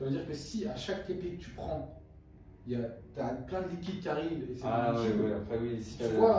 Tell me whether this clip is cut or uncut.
uncut